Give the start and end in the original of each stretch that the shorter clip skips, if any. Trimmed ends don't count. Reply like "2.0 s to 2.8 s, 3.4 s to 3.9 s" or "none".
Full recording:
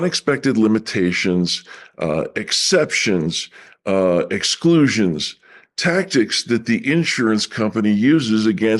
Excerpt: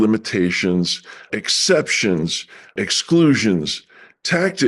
1.9 s to 2.3 s, 3.8 s to 4.3 s